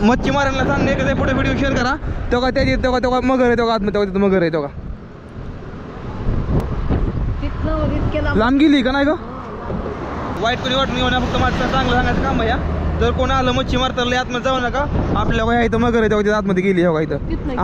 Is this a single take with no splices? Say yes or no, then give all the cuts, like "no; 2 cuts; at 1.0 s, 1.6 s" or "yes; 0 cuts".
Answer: yes; 0 cuts